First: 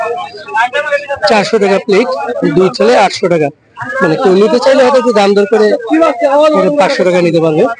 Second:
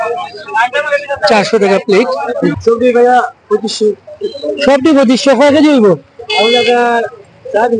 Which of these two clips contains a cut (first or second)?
second